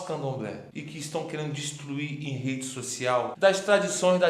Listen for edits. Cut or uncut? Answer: cut